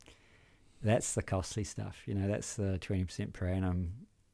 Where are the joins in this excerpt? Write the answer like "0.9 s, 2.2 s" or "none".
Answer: none